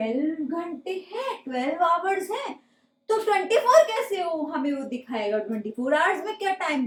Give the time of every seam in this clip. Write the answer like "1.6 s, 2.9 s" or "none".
none